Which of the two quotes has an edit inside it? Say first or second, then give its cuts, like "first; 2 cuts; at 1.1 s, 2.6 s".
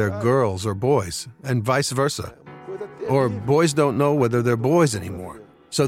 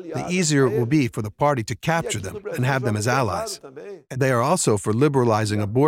second; 1 cut; at 4.0 s